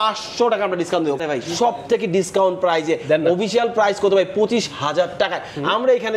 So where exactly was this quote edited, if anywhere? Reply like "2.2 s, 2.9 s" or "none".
1.2 s